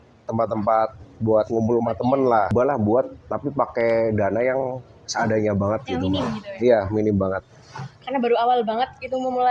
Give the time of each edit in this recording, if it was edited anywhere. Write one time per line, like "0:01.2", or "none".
0:02.5